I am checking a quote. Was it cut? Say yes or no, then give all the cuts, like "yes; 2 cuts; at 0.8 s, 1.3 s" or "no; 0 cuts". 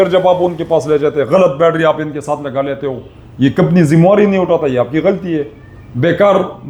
no; 0 cuts